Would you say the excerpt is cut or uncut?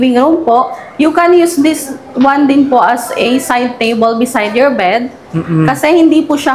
uncut